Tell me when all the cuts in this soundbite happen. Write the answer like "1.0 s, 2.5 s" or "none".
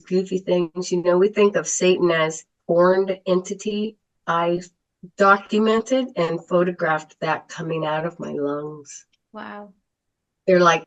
2.6 s, 4.2 s